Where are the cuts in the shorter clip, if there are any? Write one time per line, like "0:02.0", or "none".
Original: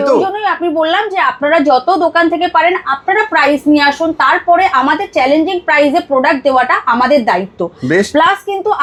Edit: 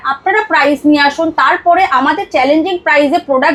none